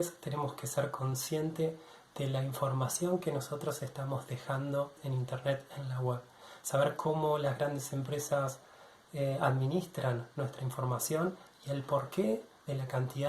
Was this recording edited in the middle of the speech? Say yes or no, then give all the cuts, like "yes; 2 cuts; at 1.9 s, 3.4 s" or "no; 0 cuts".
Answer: yes; 1 cut; at 5.0 s